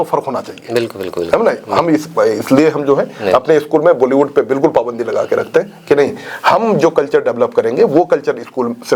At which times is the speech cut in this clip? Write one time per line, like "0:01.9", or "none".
none